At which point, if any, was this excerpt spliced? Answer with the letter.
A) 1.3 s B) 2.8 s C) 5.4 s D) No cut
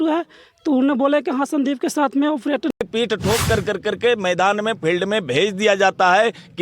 B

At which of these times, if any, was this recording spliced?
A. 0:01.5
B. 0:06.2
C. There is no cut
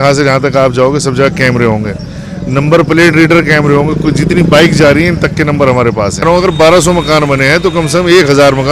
B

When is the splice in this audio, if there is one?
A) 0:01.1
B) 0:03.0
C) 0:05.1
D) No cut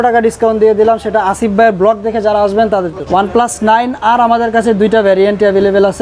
B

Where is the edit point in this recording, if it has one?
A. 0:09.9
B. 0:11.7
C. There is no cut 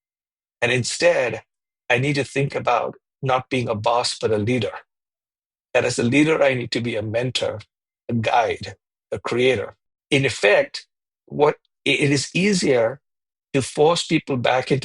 A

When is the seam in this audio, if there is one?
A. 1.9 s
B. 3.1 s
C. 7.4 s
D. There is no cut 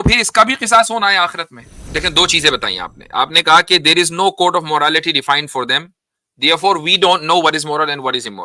A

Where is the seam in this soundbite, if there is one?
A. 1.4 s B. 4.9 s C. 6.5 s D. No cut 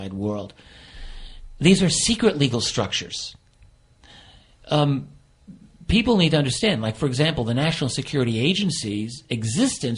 A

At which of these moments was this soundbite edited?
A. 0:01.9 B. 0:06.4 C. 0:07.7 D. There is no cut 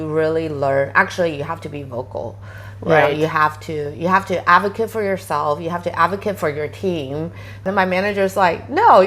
C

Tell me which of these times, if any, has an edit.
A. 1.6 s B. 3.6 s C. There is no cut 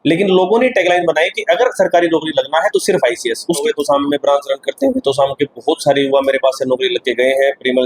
B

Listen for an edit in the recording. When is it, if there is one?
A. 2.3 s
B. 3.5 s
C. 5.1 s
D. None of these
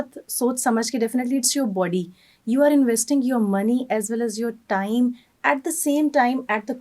D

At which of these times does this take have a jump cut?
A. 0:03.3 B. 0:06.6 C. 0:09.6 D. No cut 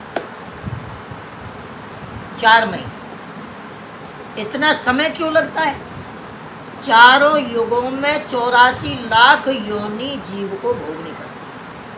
D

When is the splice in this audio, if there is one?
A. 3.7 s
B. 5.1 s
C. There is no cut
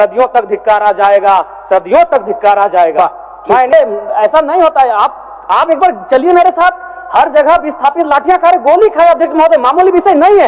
A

